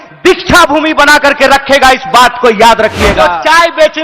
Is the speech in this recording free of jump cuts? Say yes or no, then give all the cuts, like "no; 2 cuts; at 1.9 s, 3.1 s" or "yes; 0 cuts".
no; 1 cut; at 3.1 s